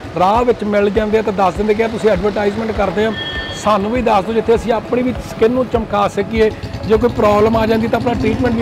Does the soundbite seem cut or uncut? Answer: uncut